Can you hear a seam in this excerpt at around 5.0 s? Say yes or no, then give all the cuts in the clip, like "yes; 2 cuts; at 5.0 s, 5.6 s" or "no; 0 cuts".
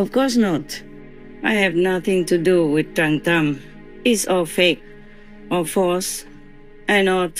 no; 1 cut; at 3.7 s